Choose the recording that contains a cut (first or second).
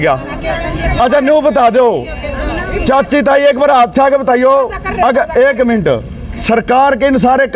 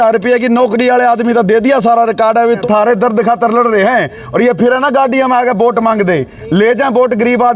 second